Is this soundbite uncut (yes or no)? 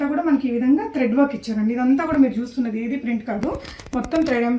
yes